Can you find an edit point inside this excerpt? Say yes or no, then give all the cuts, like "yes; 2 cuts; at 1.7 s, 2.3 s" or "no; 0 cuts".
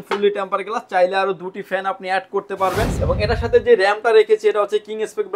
yes; 1 cut; at 2.9 s